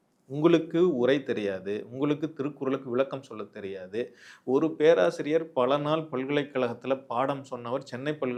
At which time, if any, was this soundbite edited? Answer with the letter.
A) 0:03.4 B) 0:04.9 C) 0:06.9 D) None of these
D